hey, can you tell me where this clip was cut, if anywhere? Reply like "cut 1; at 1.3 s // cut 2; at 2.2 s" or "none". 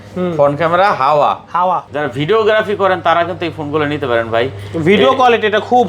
cut 1; at 1.9 s

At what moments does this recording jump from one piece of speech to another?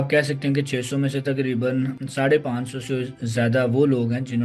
none

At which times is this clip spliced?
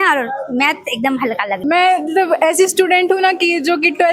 cut 1; at 1.6 s

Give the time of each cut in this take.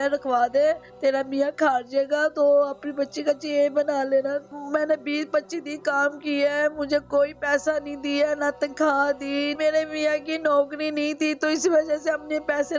cut 1; at 4.5 s // cut 2; at 9.5 s

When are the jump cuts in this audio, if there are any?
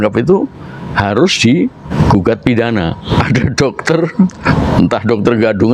cut 1; at 1.8 s // cut 2; at 3.0 s // cut 3; at 4.4 s

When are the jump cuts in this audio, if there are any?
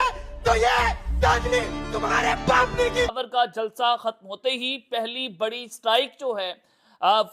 cut 1; at 3.2 s

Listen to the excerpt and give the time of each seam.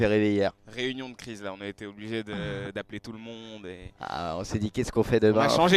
none

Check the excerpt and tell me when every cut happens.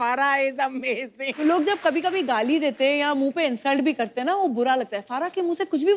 cut 1; at 1.2 s

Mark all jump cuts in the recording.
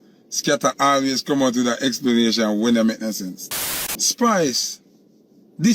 cut 1; at 3.5 s

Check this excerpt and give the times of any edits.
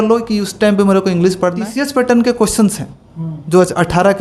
cut 1; at 1.7 s

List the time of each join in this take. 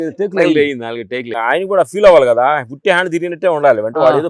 cut 1; at 1.3 s

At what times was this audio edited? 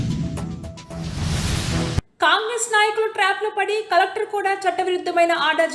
cut 1; at 2.0 s

